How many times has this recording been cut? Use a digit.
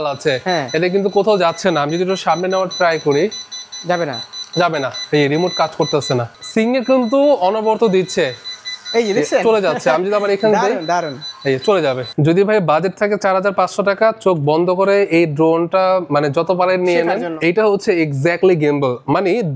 3